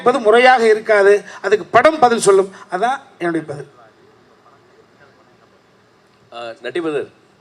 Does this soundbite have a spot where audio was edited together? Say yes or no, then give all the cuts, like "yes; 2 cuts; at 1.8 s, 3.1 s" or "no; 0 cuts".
no; 0 cuts